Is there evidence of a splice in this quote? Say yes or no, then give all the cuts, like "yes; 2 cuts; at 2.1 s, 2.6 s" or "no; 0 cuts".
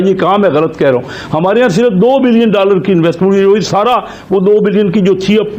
no; 0 cuts